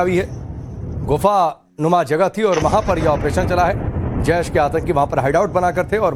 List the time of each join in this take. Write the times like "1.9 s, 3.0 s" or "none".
none